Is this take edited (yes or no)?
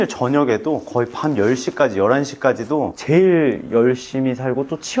yes